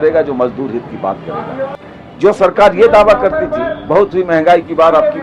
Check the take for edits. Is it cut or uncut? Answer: cut